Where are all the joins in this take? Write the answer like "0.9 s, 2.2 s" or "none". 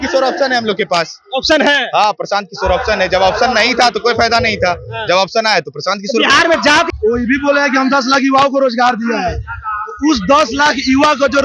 6.9 s

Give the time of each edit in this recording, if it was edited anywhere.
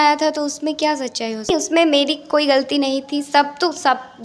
1.5 s

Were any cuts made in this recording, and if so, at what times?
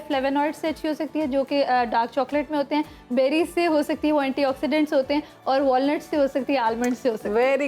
none

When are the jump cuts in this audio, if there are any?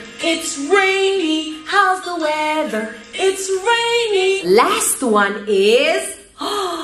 4.4 s

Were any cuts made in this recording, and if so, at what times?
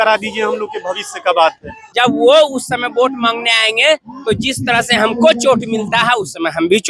1.8 s

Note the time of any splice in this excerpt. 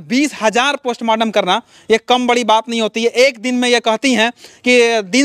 none

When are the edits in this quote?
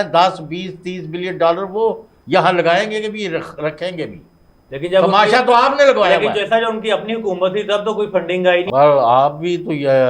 8.7 s

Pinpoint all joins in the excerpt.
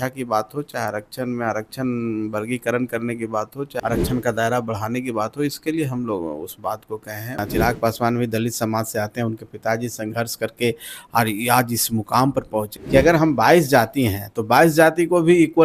3.7 s, 7.4 s, 12.7 s

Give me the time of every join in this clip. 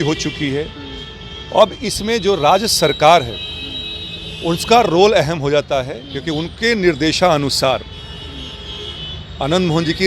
none

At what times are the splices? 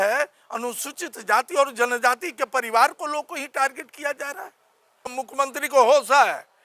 5.1 s

